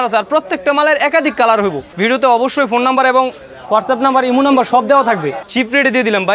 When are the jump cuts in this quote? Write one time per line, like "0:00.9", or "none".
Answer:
0:01.9
0:05.4